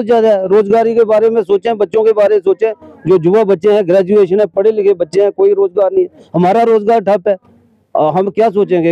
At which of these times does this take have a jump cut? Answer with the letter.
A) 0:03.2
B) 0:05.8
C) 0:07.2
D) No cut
D